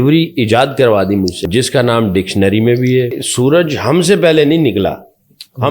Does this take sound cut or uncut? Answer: cut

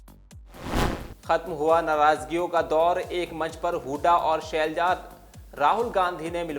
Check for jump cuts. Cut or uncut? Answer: cut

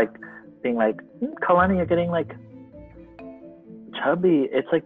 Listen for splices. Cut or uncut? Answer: cut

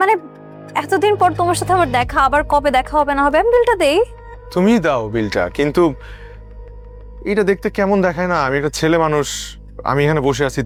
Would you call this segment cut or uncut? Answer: uncut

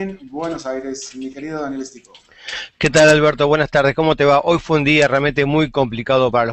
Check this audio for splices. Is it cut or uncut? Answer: uncut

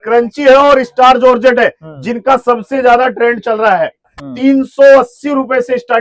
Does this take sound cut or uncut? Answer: cut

